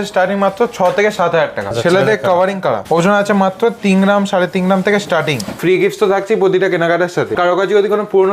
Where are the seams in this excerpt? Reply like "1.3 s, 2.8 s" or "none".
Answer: 1.7 s, 2.8 s, 5.6 s, 7.4 s